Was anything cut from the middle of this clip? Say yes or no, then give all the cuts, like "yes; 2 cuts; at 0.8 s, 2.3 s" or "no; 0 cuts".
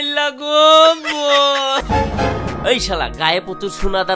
yes; 1 cut; at 1.8 s